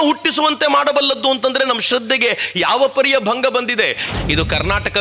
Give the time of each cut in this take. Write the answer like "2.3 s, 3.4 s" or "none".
4.1 s